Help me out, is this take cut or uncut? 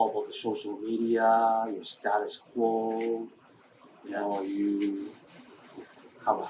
uncut